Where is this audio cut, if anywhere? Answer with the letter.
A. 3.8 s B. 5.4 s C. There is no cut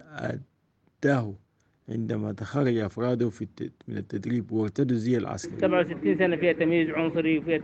B